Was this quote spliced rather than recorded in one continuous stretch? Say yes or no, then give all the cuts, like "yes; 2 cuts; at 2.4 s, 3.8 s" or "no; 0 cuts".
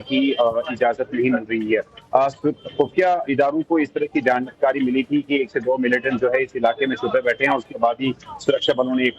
yes; 1 cut; at 1.5 s